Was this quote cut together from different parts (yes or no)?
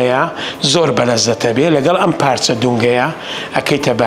no